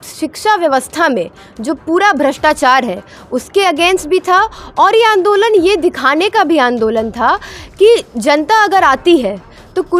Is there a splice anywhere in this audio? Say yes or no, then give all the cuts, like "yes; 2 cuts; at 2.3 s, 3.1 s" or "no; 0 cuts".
no; 0 cuts